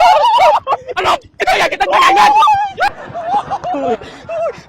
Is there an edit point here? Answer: yes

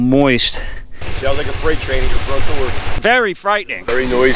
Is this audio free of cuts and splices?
no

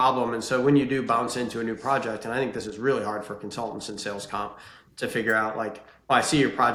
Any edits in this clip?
no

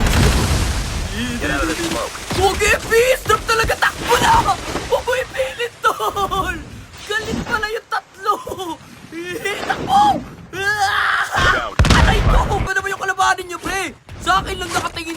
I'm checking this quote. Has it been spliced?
yes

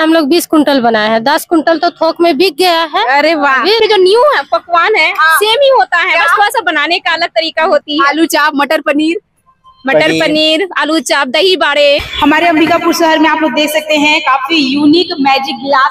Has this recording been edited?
yes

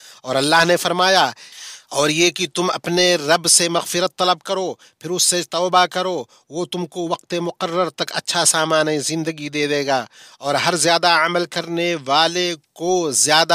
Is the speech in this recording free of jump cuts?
yes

